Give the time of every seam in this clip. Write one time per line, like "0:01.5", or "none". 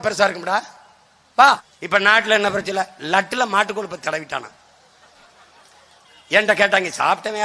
0:01.7